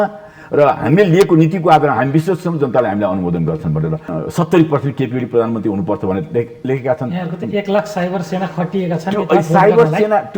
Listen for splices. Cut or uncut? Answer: cut